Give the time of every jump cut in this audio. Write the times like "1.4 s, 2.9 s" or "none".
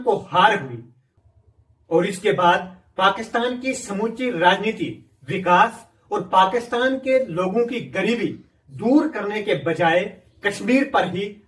none